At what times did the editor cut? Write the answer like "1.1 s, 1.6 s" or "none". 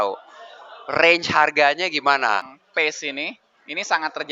2.4 s